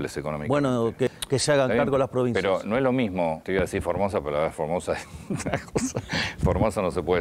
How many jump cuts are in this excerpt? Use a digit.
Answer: 2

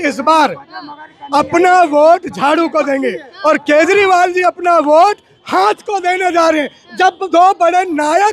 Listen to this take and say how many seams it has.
0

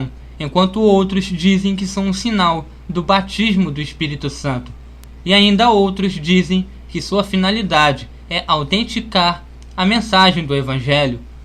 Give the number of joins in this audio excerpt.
1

